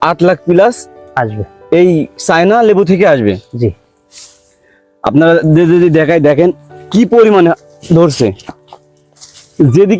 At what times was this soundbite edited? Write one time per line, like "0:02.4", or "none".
none